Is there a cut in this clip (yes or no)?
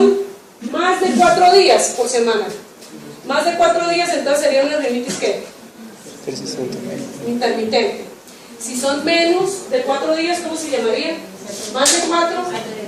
no